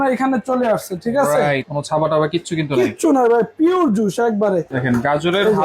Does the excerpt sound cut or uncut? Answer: cut